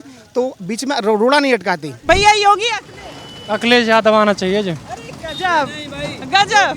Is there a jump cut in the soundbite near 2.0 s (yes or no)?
yes